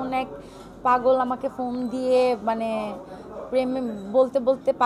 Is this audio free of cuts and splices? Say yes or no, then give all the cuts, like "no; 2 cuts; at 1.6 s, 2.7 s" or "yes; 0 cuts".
yes; 0 cuts